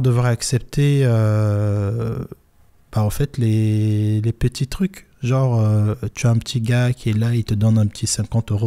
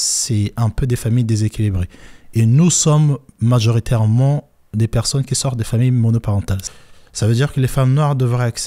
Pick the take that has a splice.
second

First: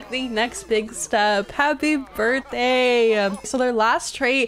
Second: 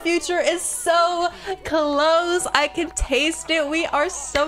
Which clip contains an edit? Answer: first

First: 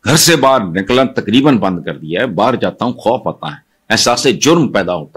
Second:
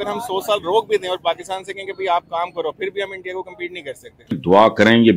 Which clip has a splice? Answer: second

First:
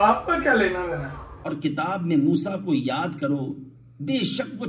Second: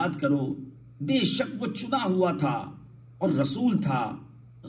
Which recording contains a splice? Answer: first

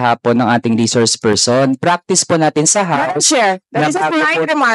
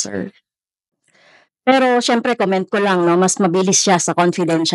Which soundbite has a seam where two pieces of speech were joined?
second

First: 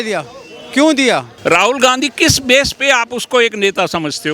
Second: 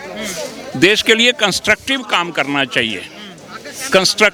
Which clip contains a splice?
first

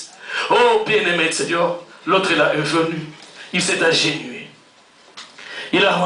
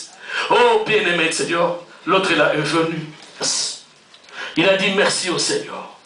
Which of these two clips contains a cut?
second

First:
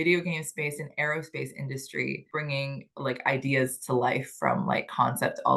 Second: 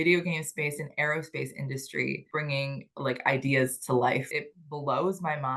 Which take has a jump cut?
second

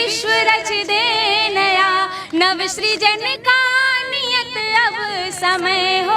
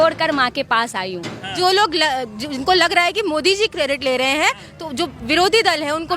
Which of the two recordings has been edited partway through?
second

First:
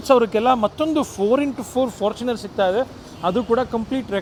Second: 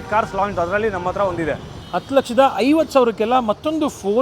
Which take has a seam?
second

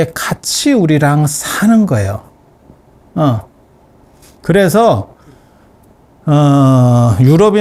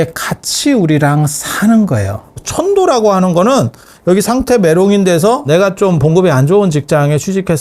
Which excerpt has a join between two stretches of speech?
second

